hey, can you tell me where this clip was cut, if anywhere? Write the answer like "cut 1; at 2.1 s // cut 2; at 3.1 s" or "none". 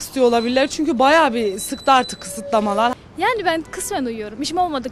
cut 1; at 2.9 s